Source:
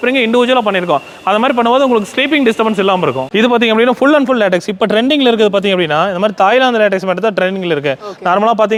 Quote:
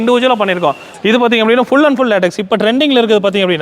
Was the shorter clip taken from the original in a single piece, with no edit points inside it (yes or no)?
no